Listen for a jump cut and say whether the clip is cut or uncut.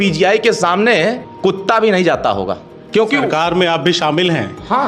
cut